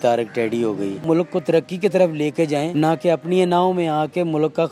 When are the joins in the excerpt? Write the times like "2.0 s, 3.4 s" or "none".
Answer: 1.0 s, 2.7 s